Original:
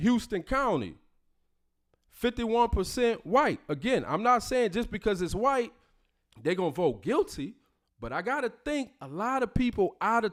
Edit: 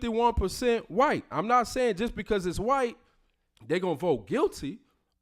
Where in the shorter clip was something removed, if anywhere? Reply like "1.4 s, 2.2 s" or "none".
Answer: 1.3 s